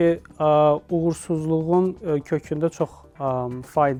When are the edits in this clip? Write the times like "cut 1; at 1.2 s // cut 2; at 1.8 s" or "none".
none